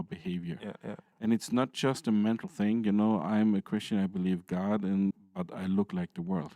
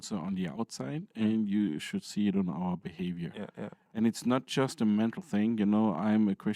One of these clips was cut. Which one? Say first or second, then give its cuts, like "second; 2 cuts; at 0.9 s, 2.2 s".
first; 1 cut; at 5.1 s